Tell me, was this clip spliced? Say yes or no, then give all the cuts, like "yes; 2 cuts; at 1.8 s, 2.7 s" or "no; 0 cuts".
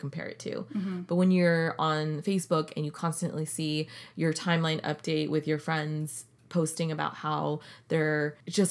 no; 0 cuts